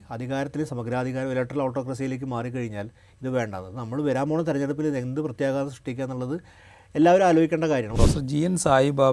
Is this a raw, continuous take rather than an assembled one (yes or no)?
no